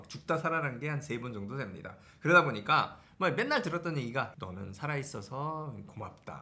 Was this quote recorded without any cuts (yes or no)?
yes